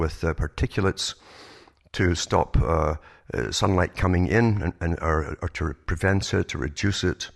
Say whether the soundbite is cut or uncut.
cut